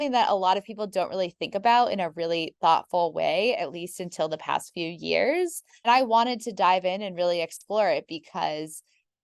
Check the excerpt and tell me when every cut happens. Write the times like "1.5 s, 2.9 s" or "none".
5.9 s